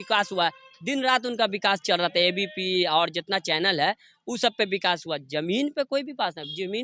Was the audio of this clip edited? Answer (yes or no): no